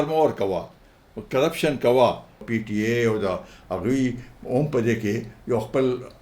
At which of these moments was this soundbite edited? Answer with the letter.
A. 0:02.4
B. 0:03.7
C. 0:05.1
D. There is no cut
A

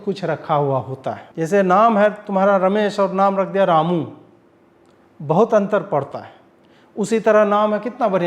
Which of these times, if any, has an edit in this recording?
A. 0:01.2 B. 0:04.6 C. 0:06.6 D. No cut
A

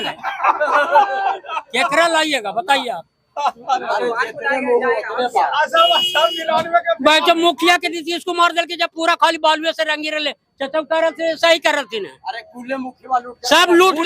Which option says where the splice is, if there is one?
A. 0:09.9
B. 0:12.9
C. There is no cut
C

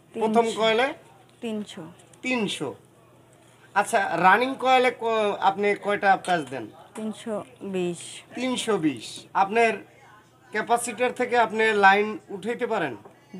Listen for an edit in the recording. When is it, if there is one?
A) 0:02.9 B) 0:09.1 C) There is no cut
B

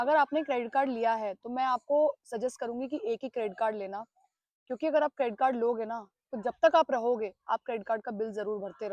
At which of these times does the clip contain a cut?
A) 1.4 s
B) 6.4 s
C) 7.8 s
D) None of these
D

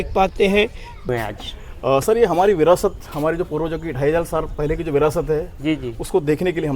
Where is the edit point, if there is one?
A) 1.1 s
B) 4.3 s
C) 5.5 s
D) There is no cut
A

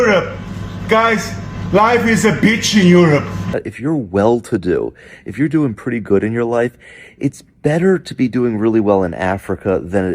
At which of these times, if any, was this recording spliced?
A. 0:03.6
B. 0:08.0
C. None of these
A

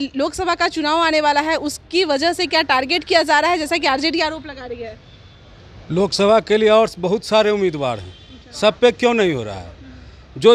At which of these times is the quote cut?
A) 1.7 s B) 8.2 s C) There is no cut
C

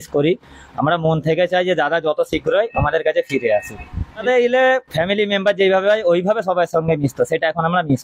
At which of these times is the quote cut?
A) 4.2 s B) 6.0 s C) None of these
A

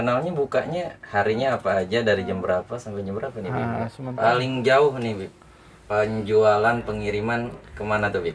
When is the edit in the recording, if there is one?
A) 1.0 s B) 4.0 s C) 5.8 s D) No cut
B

